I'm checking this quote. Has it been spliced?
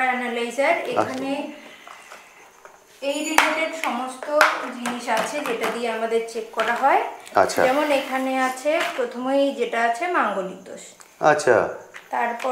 no; 0 cuts

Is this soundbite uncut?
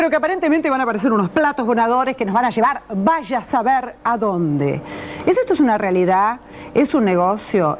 yes; 0 cuts

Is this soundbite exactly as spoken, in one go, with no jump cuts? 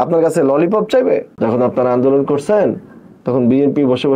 no; 1 cut; at 1.3 s

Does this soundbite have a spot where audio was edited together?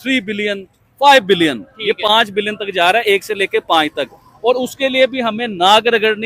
no; 0 cuts

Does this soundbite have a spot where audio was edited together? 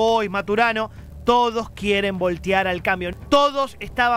yes; 1 cut; at 3.1 s

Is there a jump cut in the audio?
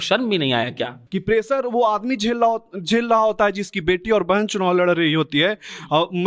yes; 1 cut; at 1.0 s

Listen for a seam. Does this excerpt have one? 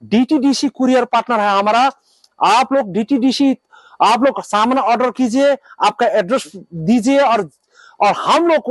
no; 0 cuts

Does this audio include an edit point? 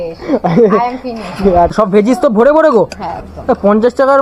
yes; 1 cut; at 1.7 s

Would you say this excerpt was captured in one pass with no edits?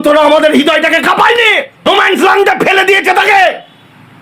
no; 1 cut; at 1.9 s

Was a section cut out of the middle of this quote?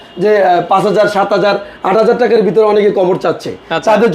no; 0 cuts

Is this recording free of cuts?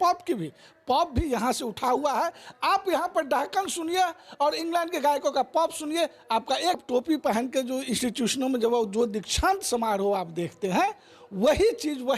no; 1 cut; at 6.8 s

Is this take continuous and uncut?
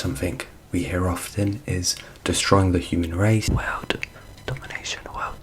no; 1 cut; at 3.4 s

